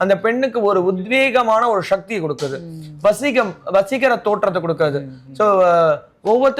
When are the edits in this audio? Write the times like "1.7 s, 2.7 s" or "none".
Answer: none